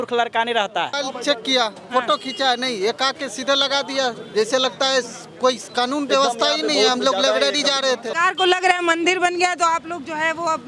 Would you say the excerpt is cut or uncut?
cut